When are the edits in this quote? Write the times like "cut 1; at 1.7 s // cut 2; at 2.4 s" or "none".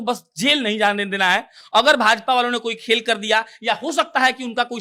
none